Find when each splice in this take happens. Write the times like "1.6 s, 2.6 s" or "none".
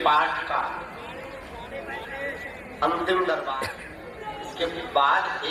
3.5 s